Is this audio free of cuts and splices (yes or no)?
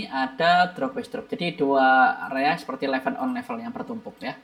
yes